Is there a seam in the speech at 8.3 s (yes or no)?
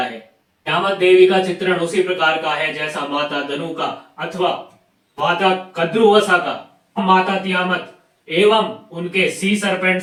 no